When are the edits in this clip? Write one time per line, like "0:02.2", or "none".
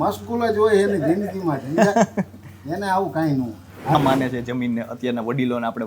0:03.9